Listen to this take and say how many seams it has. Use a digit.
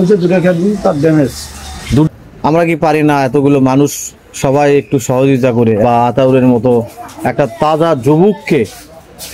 2